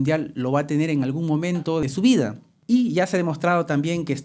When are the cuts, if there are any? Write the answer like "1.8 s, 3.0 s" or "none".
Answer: 1.8 s, 2.5 s